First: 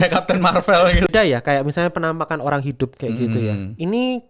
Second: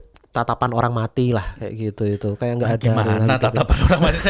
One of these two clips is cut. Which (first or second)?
first